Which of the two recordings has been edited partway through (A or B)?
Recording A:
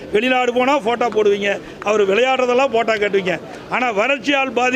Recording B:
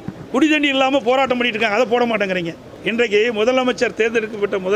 B